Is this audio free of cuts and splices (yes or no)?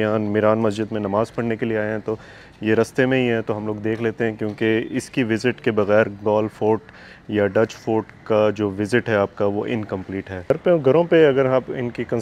no